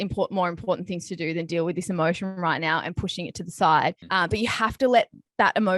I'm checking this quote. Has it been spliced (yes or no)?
yes